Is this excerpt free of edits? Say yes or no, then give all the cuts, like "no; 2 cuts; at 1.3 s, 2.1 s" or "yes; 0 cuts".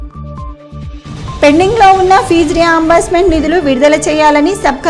no; 1 cut; at 1.2 s